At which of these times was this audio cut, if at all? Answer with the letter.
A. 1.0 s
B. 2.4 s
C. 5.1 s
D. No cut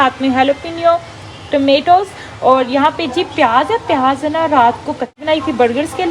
C